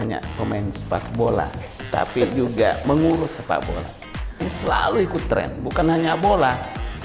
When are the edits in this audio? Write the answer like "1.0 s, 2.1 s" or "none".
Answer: 4.5 s